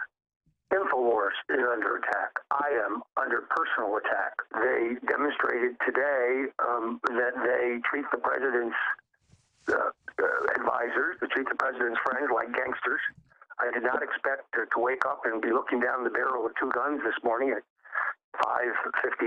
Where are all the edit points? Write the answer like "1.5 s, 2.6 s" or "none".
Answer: 4.4 s